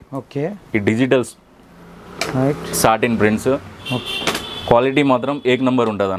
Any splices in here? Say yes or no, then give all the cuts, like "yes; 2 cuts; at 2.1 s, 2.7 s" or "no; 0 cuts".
no; 0 cuts